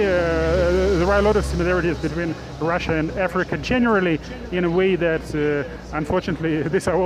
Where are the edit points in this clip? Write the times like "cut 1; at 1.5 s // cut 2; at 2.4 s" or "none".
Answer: none